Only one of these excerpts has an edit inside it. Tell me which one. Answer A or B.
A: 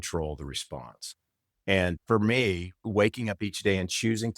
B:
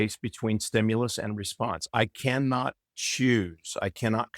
A